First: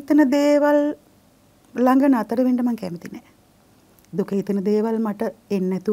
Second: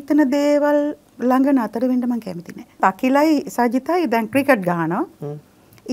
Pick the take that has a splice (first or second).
second